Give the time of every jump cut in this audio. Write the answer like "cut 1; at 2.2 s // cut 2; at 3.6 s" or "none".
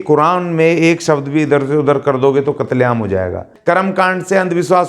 cut 1; at 3.5 s